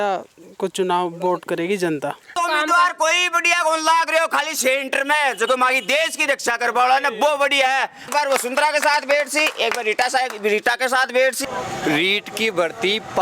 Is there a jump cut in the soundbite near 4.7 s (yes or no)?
no